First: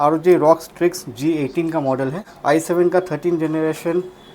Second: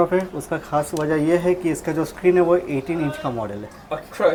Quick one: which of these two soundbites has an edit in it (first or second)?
first